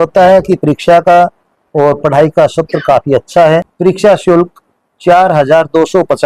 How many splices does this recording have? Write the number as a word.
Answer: one